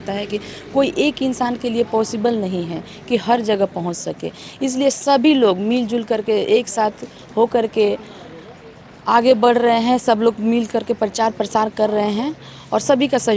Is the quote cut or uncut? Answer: uncut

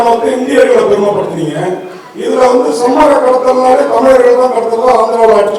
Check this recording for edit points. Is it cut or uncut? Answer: uncut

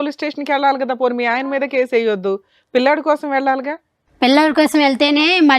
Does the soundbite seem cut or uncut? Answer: uncut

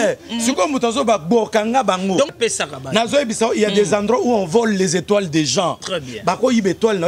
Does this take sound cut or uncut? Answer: cut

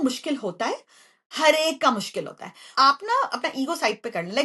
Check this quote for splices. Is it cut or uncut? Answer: cut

